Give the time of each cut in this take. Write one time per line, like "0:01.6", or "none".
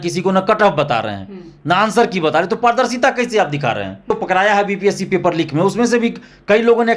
0:04.1